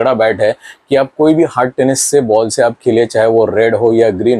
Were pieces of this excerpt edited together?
no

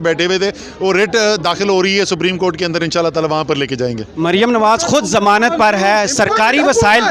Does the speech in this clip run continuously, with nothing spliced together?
yes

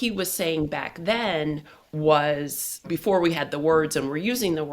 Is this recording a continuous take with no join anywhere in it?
no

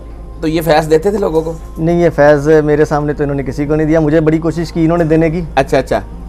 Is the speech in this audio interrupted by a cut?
no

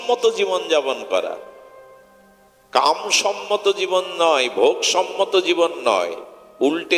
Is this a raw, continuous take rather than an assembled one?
yes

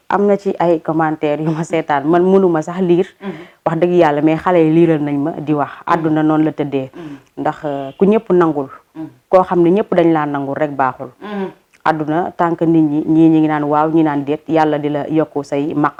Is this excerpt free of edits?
yes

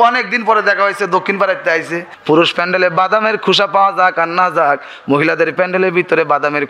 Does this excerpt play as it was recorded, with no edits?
no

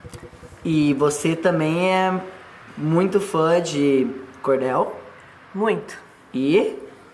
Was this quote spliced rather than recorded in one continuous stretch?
yes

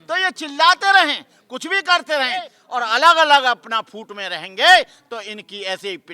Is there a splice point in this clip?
yes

